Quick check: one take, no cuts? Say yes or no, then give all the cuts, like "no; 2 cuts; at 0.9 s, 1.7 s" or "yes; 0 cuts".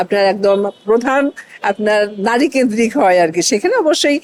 yes; 0 cuts